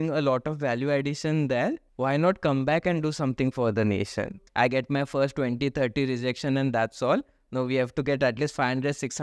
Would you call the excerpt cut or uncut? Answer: cut